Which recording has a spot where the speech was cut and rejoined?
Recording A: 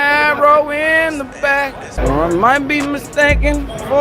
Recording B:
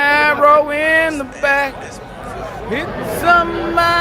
A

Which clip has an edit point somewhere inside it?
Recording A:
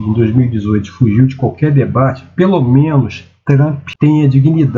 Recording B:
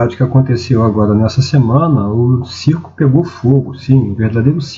A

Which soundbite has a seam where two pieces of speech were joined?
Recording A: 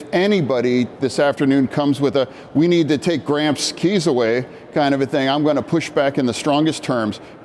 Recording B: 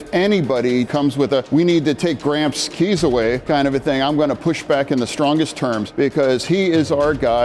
B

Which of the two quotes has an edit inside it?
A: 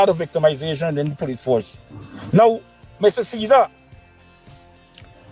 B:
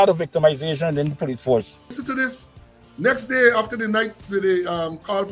B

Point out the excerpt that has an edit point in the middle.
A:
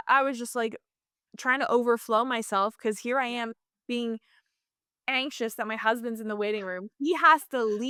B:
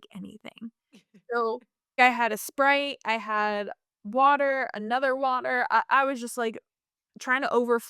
B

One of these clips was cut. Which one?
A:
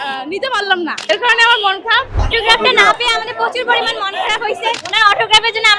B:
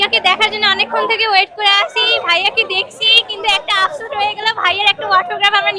A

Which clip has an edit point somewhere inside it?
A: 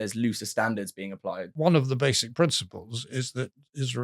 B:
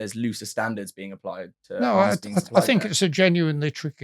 A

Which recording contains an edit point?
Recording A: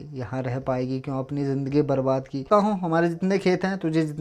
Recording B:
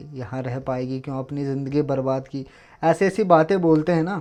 A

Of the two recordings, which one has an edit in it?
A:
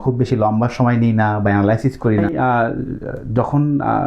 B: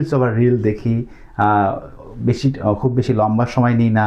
A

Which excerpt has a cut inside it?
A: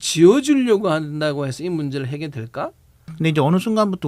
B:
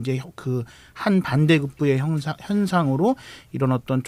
A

